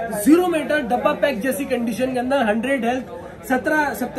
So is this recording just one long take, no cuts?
yes; 0 cuts

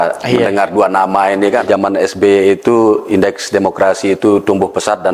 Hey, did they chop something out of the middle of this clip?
yes; 1 cut; at 1.6 s

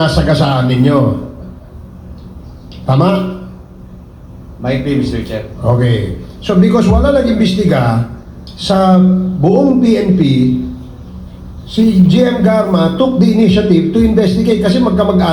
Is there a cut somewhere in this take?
no; 0 cuts

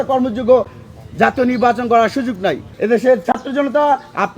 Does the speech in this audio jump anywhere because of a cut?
yes; 1 cut; at 2.7 s

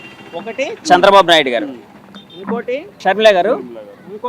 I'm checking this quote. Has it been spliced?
yes; 1 cut; at 3.0 s

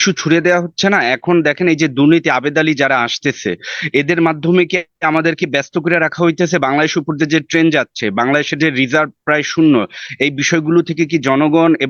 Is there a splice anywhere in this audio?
no; 0 cuts

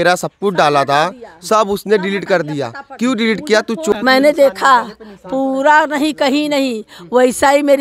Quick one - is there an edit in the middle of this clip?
yes; 1 cut; at 3.9 s

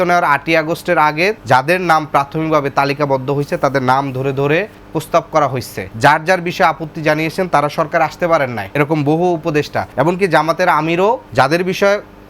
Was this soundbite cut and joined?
yes; 6 cuts; at 1.4 s, 4.8 s, 5.8 s, 8.6 s, 9.8 s, 11.3 s

